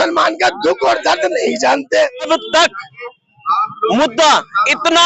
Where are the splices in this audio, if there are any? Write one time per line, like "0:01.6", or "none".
0:02.3